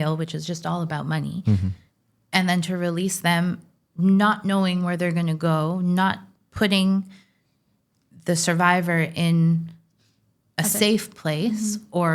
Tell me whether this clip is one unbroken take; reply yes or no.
yes